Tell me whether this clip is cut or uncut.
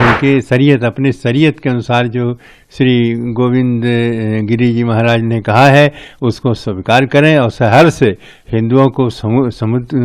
uncut